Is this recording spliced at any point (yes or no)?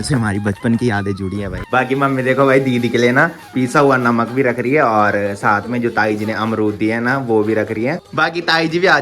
yes